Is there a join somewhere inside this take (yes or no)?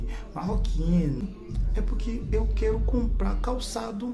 yes